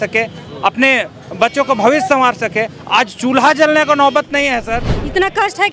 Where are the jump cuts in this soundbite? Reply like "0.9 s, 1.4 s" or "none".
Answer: 4.8 s